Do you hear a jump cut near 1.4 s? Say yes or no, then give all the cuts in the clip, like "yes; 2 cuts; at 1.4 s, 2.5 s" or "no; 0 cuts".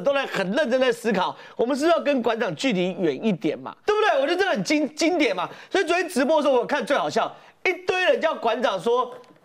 no; 1 cut; at 3.7 s